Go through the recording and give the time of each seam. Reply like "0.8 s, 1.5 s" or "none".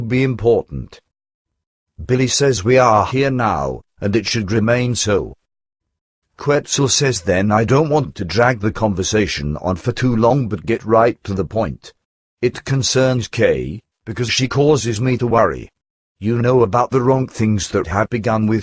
8.8 s